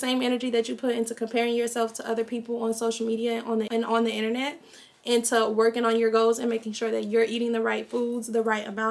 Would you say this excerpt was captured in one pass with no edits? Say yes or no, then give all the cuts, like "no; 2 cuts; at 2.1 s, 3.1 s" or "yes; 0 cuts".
yes; 0 cuts